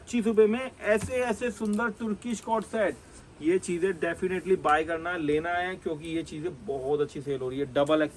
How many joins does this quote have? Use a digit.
0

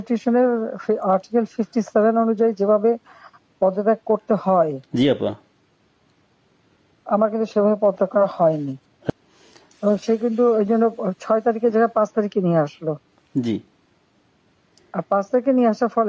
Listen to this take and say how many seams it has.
1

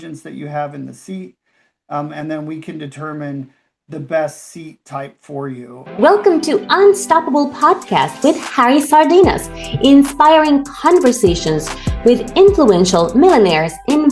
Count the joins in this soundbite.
1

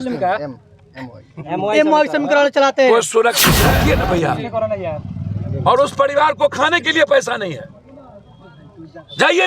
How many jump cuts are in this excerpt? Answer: 1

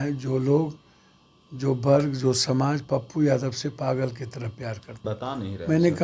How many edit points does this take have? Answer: 1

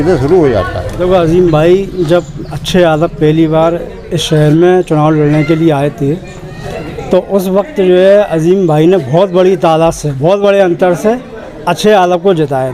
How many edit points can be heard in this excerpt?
1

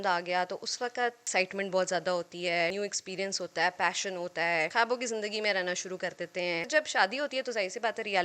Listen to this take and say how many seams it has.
4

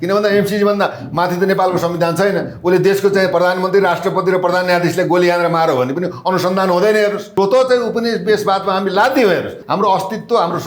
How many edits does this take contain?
2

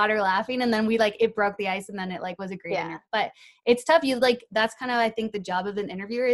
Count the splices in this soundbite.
1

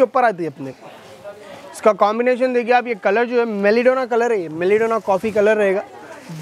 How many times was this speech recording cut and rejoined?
0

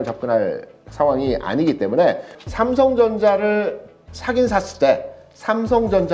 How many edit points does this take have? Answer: 1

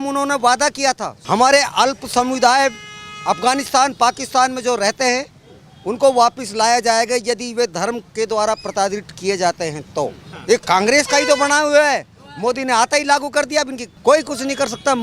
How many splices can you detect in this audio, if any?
3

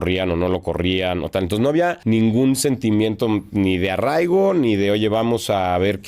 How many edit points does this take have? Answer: 1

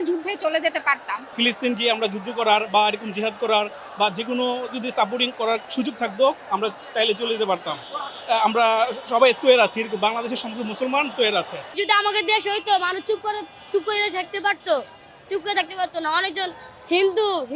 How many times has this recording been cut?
2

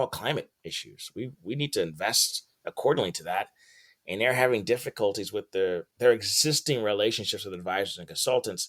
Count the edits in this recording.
0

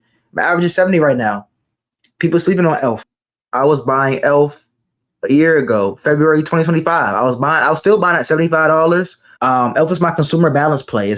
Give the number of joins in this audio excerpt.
2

